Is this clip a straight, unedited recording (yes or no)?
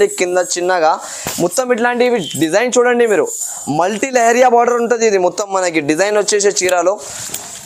yes